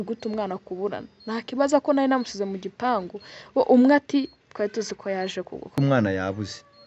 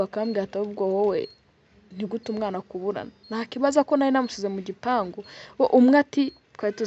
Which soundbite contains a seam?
first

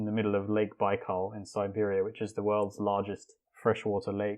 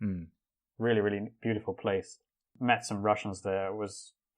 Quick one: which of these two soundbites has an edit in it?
second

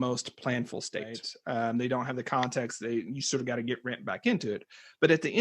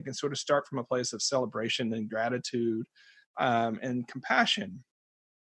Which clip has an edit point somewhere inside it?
first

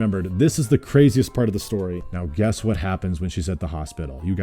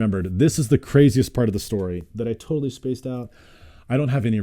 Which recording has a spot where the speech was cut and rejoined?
first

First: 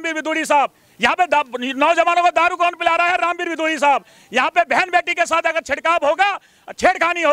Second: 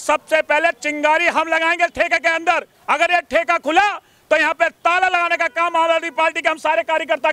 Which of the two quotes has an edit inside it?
second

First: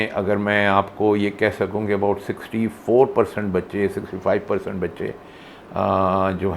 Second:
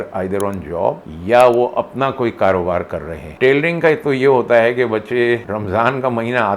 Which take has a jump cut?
second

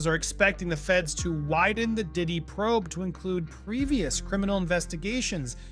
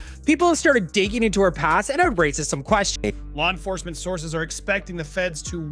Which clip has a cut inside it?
second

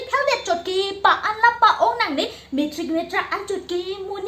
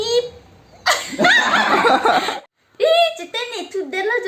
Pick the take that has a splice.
second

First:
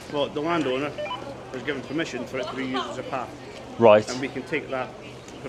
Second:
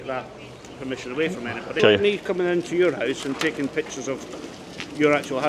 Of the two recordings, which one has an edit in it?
second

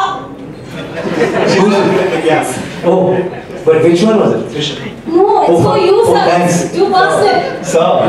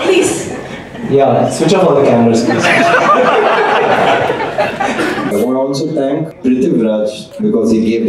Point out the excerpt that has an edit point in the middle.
second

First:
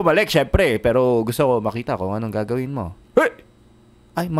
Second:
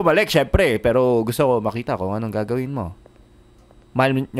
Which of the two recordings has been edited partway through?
first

